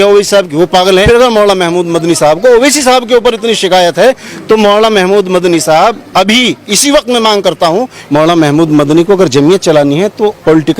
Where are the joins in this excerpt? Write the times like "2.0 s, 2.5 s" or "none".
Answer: 1.0 s, 8.0 s